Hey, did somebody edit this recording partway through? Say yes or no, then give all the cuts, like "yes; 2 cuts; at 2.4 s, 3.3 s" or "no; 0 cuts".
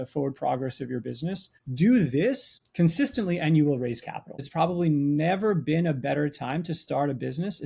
yes; 1 cut; at 4.4 s